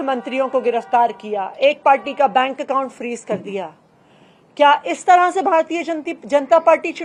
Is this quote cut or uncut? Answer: uncut